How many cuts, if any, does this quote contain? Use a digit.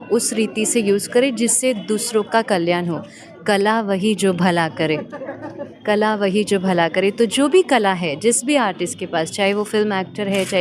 0